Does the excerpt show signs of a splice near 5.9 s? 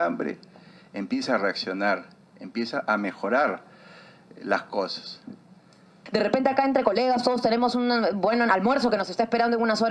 yes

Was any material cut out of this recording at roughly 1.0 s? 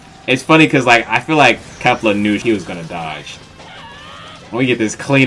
no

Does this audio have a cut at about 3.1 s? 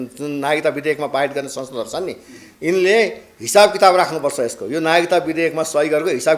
no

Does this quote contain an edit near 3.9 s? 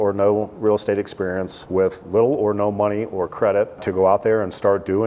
yes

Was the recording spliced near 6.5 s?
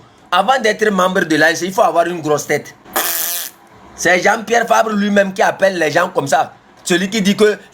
no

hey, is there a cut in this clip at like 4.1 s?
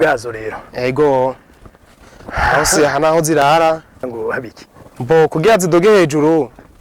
yes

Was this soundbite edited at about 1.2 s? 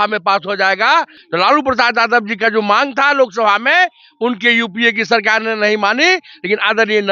yes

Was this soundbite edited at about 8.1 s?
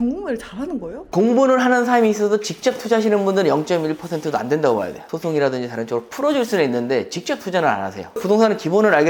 yes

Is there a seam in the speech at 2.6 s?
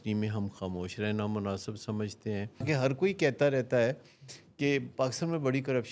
yes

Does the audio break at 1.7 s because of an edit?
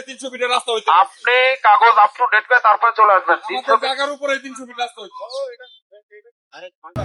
no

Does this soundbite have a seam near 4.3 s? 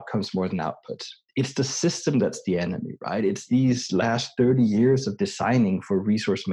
no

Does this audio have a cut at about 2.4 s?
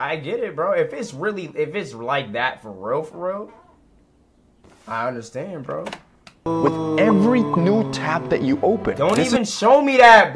no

